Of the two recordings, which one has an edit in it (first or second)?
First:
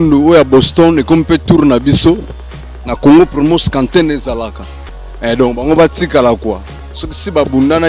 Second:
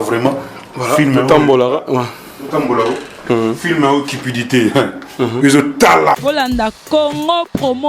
second